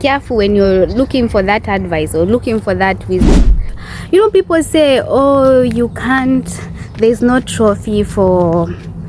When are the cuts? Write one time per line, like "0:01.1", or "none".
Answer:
0:03.6